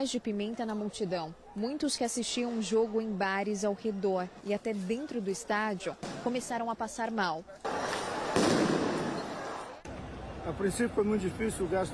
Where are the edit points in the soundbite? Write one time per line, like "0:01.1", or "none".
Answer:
none